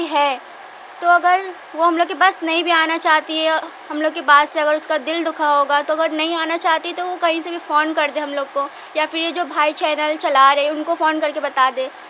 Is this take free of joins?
yes; 0 cuts

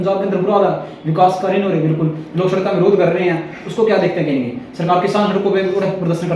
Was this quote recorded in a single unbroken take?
yes; 0 cuts

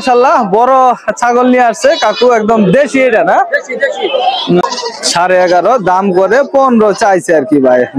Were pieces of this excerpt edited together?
yes; 1 cut; at 4.6 s

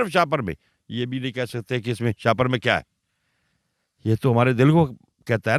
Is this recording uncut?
yes; 0 cuts

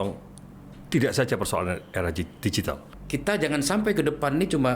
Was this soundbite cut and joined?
yes; 1 cut; at 2.9 s

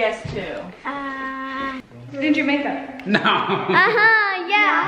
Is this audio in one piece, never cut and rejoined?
no; 1 cut; at 2.0 s

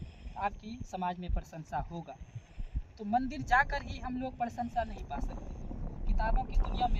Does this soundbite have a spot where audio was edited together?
no; 0 cuts

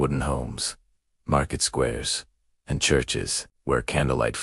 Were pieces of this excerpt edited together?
no; 0 cuts

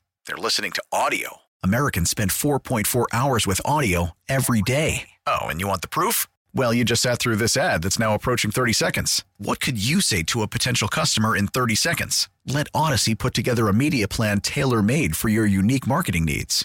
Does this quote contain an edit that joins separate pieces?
no; 0 cuts

